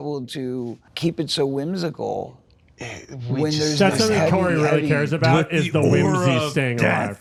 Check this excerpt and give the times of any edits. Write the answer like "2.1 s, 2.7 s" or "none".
none